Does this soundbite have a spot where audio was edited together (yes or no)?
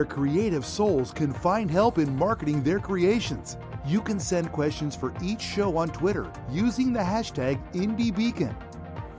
no